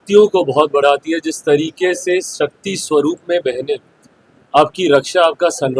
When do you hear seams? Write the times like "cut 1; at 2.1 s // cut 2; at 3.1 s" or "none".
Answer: none

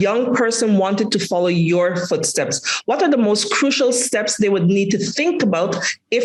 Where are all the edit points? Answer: none

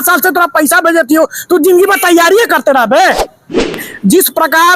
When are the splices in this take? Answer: cut 1; at 3.8 s

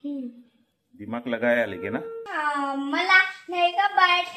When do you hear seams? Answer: cut 1; at 2.2 s

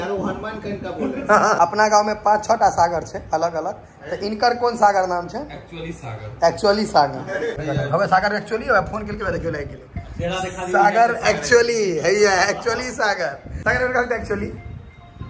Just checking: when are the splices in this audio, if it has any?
cut 1; at 1.6 s // cut 2; at 7.5 s // cut 3; at 13.5 s

